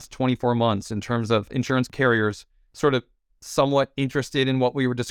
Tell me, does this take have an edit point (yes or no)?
yes